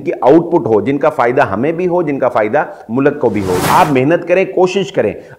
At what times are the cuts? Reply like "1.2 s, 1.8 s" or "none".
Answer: 3.6 s